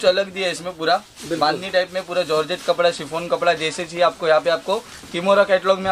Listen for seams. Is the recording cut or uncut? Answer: uncut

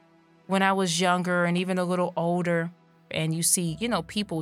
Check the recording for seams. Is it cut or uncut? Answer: cut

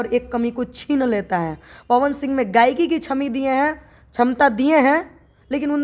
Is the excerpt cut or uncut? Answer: uncut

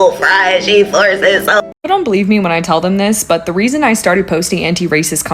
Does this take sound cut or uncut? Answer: cut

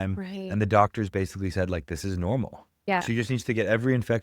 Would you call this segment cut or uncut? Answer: cut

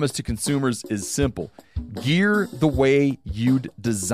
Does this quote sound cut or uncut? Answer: uncut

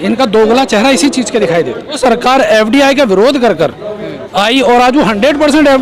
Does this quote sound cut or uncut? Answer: cut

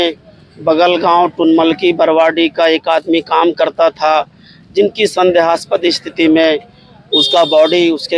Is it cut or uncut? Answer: uncut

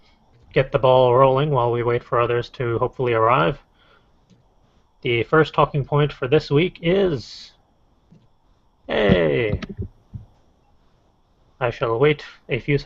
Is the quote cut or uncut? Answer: uncut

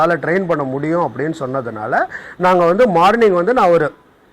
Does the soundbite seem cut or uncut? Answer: uncut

